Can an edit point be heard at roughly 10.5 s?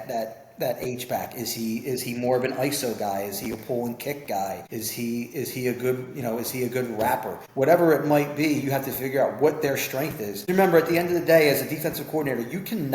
yes; 3 cuts; at 4.6 s, 7.4 s, 10.5 s

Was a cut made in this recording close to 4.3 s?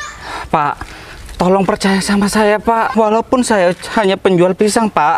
no; 1 cut; at 2.9 s

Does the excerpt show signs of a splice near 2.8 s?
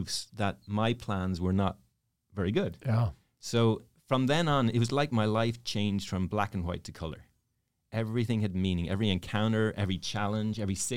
no; 0 cuts

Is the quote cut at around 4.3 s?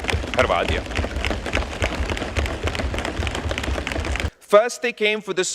yes; 1 cut; at 4.3 s

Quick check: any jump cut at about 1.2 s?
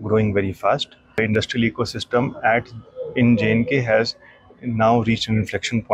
yes; 1 cut; at 1.2 s

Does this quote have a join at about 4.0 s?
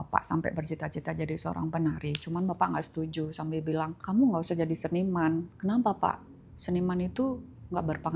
yes; 1 cut; at 4.0 s

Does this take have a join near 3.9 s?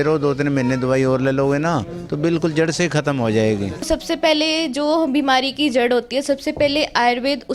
yes; 1 cut; at 3.9 s

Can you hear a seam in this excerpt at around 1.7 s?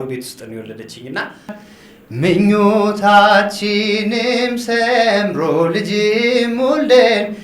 yes; 1 cut; at 1.7 s

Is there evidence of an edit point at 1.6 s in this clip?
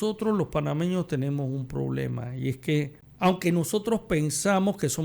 no; 1 cut; at 3.0 s

